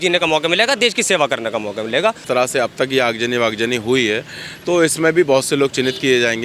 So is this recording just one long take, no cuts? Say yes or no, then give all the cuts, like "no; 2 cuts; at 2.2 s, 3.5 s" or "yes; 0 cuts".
no; 1 cut; at 2.2 s